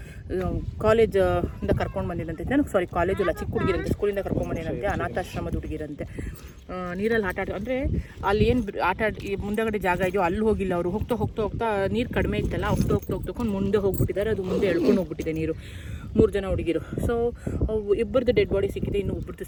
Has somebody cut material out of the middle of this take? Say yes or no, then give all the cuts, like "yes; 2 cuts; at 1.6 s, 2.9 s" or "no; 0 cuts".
no; 0 cuts